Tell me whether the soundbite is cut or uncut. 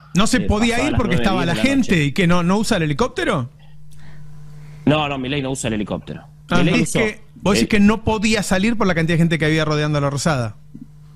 cut